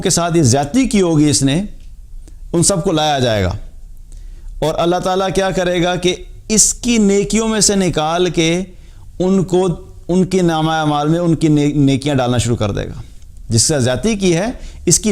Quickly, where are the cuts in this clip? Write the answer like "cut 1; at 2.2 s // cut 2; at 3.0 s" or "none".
none